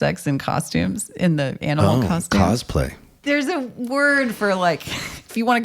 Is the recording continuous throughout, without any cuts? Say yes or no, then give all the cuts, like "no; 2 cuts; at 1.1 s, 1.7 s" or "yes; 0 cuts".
no; 1 cut; at 3.2 s